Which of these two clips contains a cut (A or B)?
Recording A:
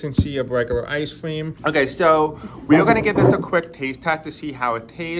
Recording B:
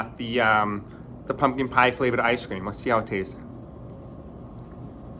A